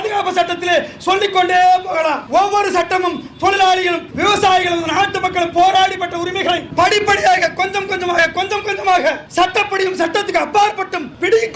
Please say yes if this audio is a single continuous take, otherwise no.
yes